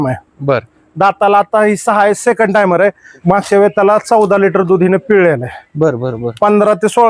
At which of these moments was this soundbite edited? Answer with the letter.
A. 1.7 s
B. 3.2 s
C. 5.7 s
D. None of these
B